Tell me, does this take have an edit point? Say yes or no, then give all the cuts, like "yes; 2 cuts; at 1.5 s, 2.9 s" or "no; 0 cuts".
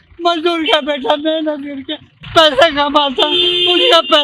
no; 0 cuts